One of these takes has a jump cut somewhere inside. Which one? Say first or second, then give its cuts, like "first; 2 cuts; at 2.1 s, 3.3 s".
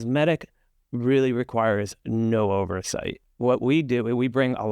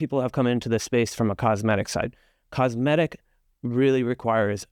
first; 1 cut; at 3.2 s